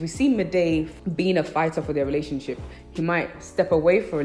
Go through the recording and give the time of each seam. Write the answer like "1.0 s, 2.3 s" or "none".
0.9 s